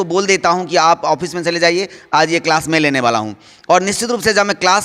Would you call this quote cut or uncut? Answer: uncut